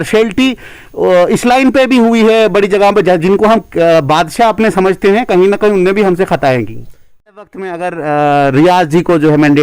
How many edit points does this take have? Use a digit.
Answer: 1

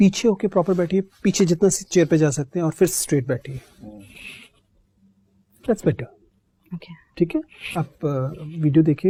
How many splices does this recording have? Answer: 0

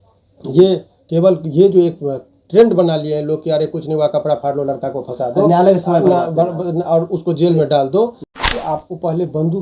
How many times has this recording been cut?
1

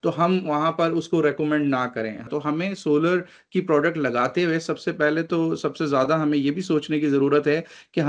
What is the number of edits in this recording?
1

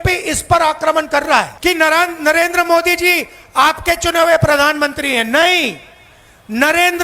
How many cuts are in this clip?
1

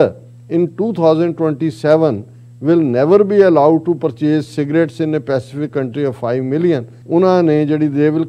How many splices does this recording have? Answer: 1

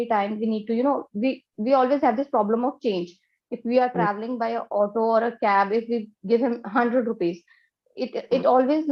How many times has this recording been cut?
0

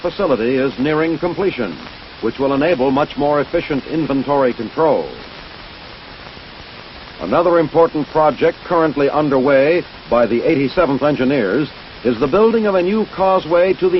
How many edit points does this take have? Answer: 0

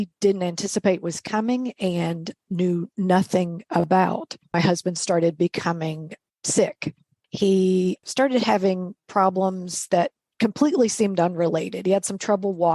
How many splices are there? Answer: 4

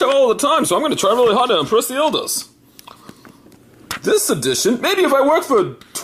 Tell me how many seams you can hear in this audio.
1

